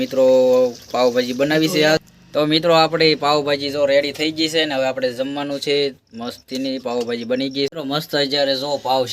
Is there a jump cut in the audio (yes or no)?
yes